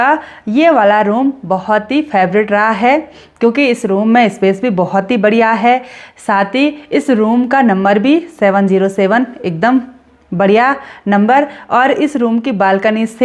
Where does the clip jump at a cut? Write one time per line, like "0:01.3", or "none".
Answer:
none